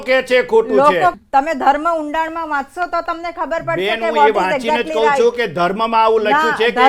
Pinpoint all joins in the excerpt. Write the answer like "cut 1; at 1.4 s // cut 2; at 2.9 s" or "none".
cut 1; at 1.2 s